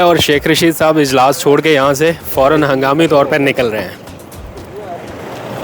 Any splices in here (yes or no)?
no